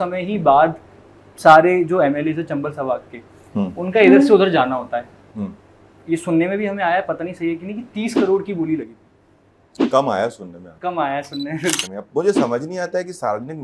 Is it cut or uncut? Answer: cut